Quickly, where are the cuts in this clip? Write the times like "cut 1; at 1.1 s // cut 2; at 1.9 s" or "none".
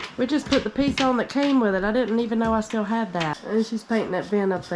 cut 1; at 3.4 s